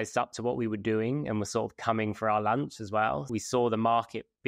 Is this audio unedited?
no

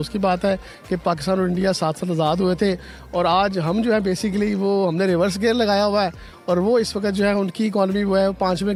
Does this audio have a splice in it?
no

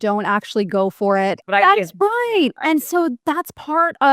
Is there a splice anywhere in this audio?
yes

